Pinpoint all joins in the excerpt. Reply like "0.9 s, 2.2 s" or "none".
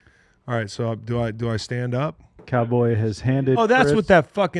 none